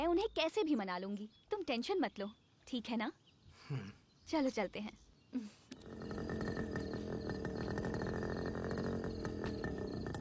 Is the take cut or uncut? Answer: cut